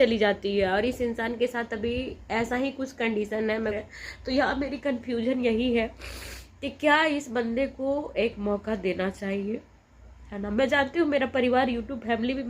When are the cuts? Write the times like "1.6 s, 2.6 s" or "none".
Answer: 3.8 s

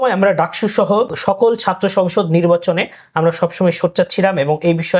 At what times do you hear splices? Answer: 1.1 s

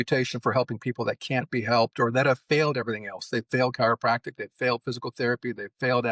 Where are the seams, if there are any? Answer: none

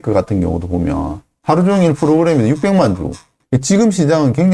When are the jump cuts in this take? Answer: 3.3 s

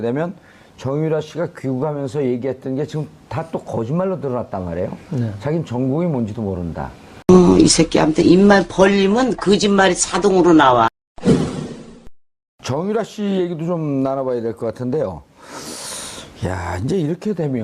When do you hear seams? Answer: 7.1 s

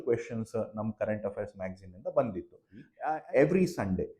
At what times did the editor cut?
2.9 s

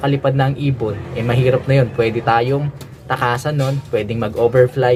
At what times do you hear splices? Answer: none

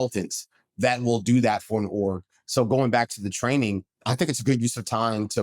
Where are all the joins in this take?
4.0 s

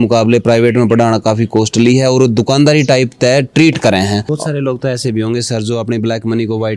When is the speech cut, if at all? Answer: 4.2 s

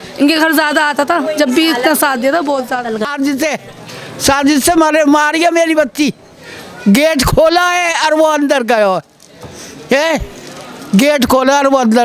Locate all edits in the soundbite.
3.0 s

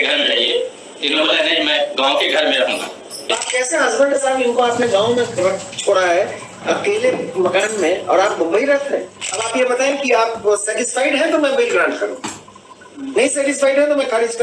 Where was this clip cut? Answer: 3.4 s, 9.5 s

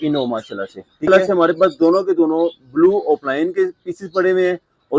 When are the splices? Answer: 1.1 s

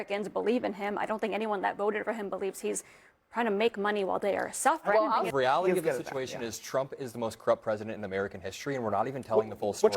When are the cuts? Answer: 5.3 s

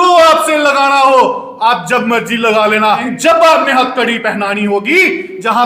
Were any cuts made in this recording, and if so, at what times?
3.1 s

